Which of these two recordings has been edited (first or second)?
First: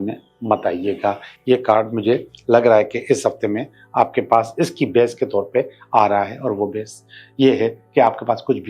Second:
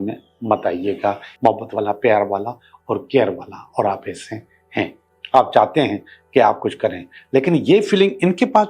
second